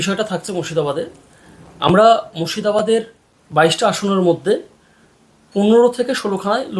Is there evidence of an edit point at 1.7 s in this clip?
no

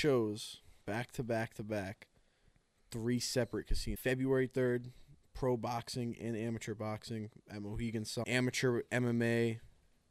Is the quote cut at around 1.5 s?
no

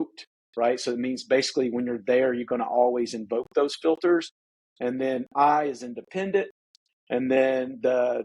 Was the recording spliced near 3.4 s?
no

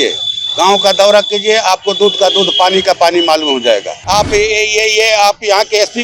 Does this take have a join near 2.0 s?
no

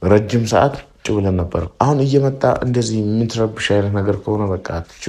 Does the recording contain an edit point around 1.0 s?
yes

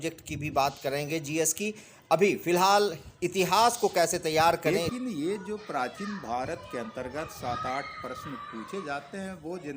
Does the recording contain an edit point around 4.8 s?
yes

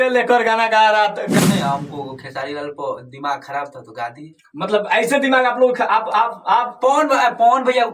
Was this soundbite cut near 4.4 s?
no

